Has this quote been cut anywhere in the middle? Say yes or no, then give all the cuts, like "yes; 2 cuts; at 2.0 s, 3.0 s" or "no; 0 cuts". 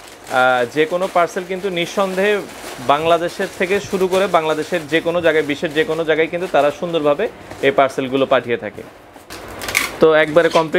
no; 0 cuts